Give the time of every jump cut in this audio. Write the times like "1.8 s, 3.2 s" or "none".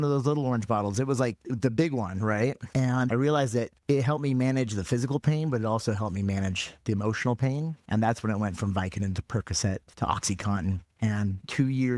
none

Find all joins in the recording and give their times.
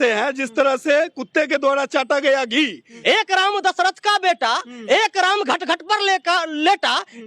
2.9 s

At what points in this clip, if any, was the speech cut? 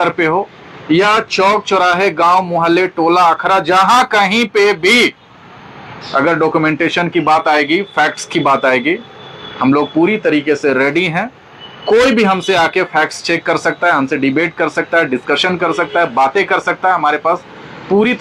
none

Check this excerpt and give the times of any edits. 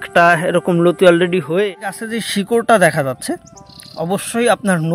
2.1 s

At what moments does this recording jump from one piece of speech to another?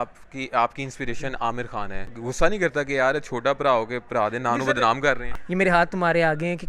2.1 s, 5.3 s

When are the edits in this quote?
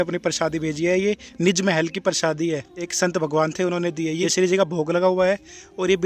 2.8 s, 4.2 s

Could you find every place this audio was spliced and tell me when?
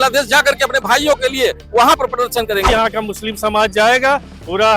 2.7 s

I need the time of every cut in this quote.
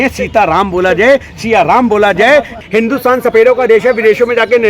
2.6 s

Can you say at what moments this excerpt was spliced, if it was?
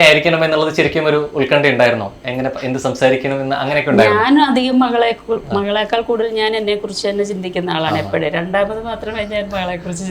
none

